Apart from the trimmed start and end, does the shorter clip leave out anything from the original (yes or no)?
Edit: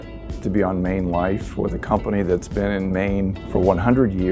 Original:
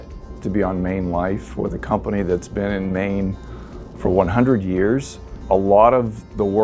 yes